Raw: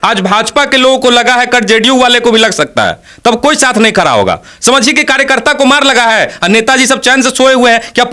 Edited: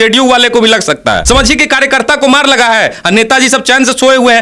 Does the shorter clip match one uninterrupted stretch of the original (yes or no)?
no